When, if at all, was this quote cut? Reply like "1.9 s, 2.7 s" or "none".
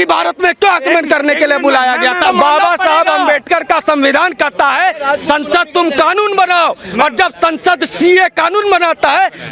2.2 s